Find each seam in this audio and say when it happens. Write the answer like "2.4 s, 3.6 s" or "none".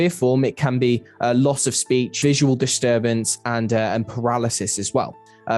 2.2 s